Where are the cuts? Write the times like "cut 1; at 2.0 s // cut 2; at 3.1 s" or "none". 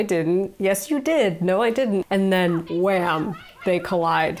cut 1; at 2.0 s